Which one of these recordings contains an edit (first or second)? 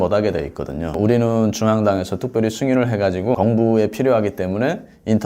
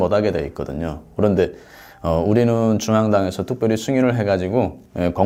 first